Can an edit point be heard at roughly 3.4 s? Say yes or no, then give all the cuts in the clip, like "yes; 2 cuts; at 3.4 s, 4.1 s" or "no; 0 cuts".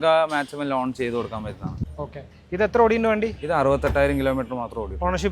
no; 1 cut; at 1.8 s